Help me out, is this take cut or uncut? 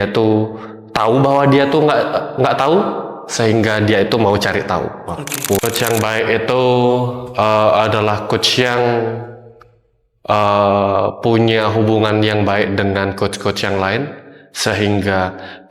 cut